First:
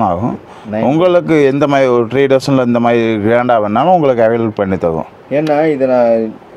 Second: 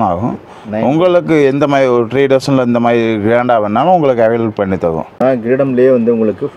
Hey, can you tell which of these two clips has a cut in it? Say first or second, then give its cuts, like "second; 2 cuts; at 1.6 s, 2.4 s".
second; 1 cut; at 5.2 s